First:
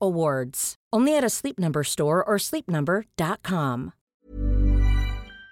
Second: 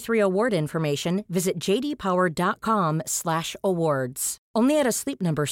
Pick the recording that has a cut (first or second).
first